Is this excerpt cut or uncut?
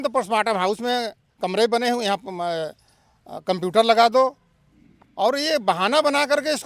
uncut